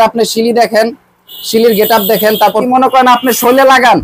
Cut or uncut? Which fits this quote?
cut